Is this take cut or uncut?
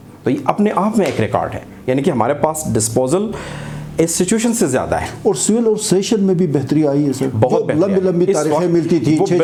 uncut